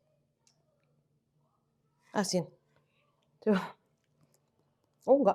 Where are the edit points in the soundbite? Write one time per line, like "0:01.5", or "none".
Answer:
none